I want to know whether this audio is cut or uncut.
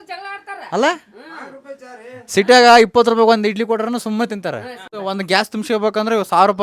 cut